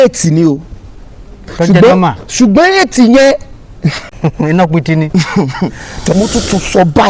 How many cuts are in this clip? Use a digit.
2